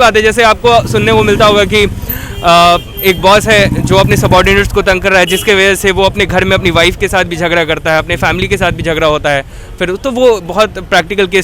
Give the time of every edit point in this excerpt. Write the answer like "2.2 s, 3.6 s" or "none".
none